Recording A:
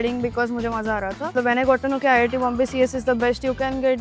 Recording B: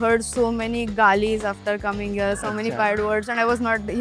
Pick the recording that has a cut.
A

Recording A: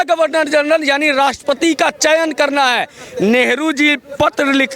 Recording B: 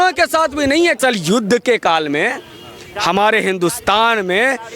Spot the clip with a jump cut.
B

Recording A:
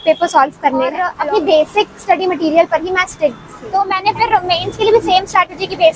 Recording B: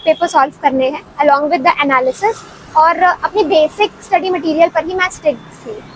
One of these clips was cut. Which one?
A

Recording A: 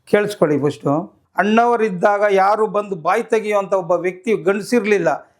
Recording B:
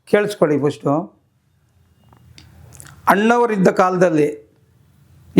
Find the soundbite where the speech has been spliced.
A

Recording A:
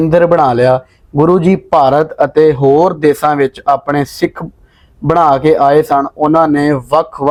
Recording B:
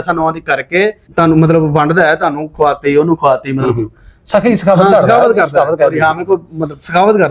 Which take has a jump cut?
B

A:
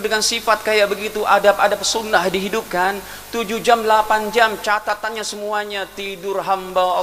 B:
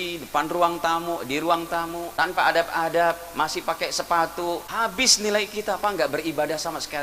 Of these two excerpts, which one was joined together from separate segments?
B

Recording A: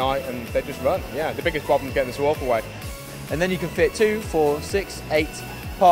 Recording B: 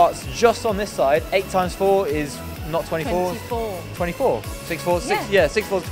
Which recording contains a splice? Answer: A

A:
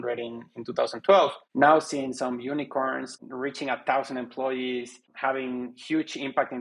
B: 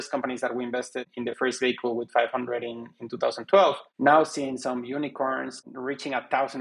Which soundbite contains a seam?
B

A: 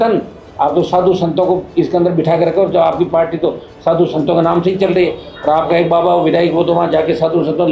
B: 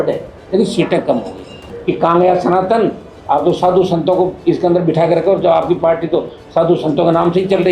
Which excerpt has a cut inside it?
B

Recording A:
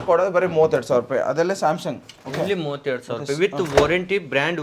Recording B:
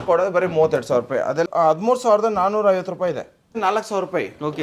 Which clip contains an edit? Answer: B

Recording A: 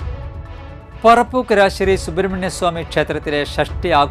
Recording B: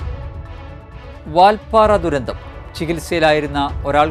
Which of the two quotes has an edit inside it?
B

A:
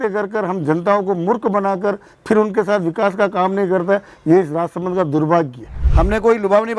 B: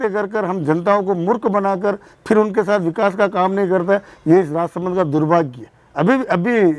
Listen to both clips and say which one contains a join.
A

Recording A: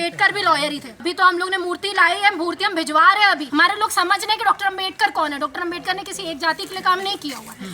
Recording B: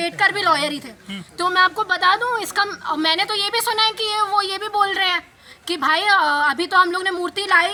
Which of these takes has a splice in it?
A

